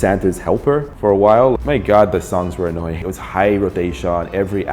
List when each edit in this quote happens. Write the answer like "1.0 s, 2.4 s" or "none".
1.5 s